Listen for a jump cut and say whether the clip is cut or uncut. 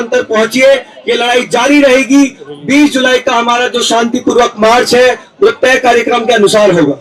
uncut